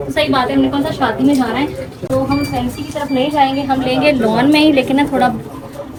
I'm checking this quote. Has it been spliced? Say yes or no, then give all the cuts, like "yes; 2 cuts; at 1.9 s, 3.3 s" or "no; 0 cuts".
no; 0 cuts